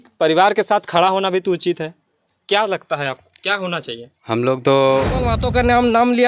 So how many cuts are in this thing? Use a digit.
1